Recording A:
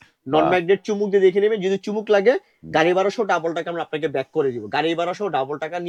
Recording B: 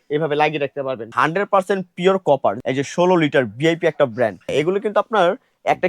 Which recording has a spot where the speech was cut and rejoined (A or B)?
B